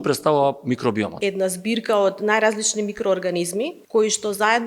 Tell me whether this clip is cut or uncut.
cut